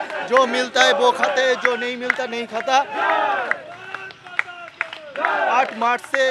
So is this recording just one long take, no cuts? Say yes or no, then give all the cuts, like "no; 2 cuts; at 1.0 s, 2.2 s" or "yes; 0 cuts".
yes; 0 cuts